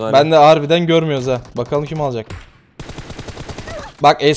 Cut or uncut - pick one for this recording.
uncut